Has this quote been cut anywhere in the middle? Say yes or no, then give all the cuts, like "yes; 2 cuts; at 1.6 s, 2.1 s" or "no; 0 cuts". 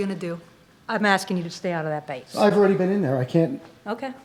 no; 0 cuts